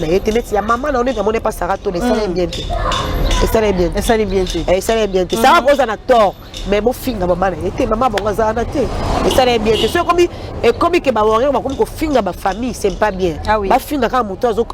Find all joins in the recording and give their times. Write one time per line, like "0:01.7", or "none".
none